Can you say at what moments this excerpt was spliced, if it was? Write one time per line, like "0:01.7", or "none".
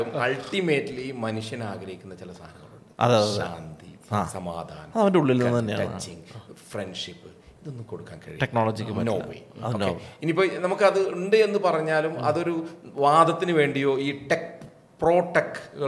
none